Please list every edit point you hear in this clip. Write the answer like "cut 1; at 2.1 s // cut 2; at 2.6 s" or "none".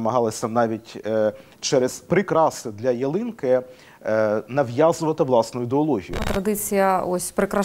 cut 1; at 2.0 s // cut 2; at 6.2 s